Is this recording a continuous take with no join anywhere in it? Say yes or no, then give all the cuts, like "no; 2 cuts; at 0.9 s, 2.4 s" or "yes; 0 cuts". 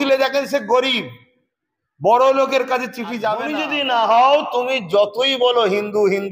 no; 1 cut; at 3.5 s